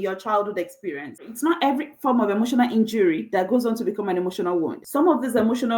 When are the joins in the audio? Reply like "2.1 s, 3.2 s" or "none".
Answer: 1.2 s, 4.8 s